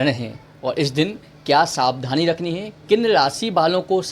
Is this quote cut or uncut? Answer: uncut